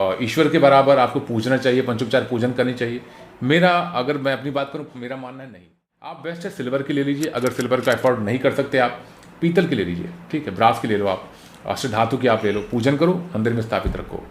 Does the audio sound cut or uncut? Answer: cut